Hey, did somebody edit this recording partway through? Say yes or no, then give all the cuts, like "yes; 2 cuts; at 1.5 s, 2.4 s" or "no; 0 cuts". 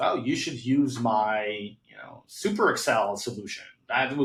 no; 0 cuts